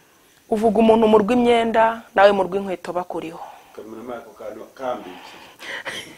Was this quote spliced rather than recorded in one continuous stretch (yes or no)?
no